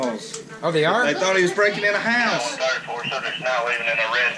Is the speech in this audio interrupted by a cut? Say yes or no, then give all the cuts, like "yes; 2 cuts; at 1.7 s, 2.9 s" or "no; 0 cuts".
no; 0 cuts